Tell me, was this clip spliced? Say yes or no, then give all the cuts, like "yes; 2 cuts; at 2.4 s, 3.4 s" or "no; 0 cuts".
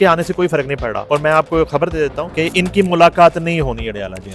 yes; 2 cuts; at 1.0 s, 2.2 s